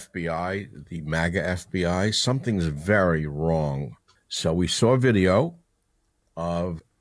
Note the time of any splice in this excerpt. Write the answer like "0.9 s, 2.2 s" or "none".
none